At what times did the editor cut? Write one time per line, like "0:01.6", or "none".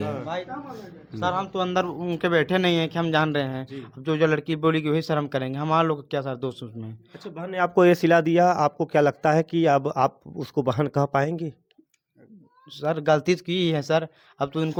none